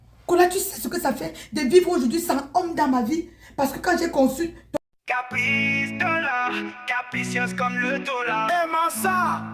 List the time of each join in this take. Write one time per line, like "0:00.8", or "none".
0:04.7